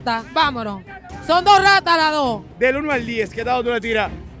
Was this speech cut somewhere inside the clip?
yes; 1 cut; at 2.5 s

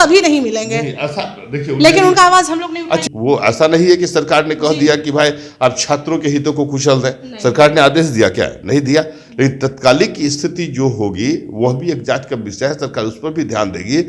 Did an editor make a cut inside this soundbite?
yes; 1 cut; at 3.0 s

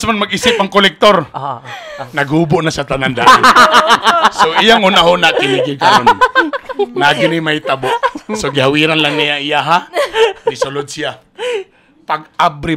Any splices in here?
no; 0 cuts

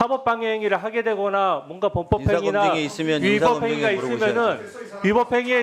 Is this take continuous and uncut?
yes; 0 cuts

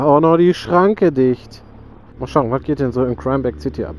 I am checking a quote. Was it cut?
yes; 1 cut; at 2.1 s

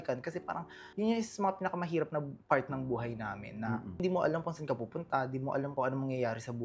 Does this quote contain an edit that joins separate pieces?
yes; 2 cuts; at 4.0 s, 5.7 s

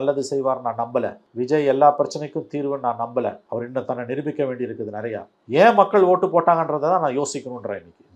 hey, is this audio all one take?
no; 3 cuts; at 1.2 s, 3.4 s, 5.3 s

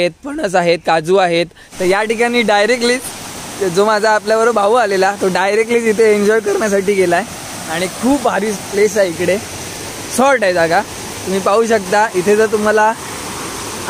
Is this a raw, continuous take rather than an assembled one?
no; 1 cut; at 1.6 s

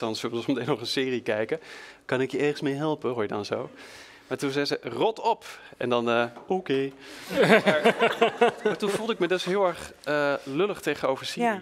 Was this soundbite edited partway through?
no; 0 cuts

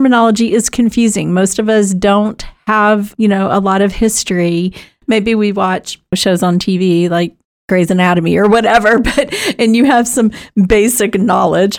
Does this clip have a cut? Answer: no; 0 cuts

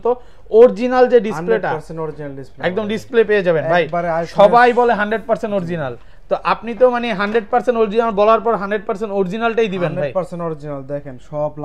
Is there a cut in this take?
no; 0 cuts

